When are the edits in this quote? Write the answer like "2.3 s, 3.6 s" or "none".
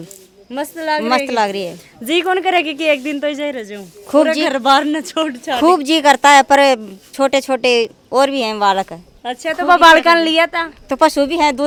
none